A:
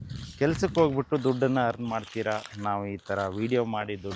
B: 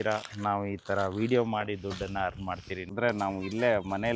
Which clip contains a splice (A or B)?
B